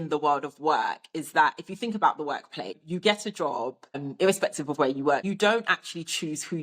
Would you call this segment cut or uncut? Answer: cut